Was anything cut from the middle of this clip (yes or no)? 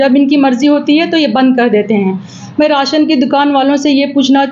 no